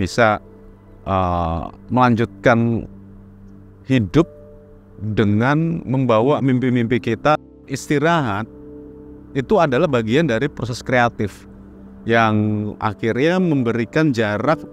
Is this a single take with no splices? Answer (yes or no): no